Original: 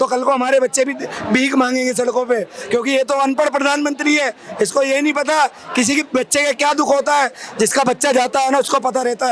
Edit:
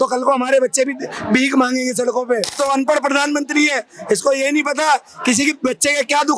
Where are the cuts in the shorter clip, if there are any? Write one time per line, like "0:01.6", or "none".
0:02.6